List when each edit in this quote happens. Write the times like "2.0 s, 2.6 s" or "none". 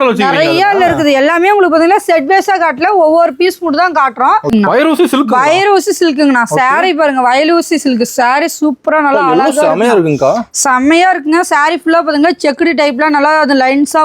4.5 s